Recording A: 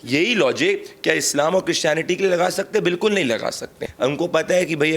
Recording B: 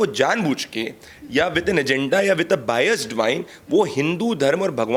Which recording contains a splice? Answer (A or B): A